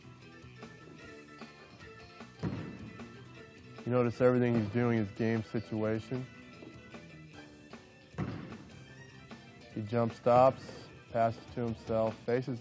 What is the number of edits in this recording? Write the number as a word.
one